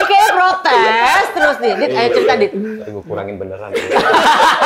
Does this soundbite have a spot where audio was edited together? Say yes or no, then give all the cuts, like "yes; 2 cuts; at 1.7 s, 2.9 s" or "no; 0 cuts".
yes; 1 cut; at 2.8 s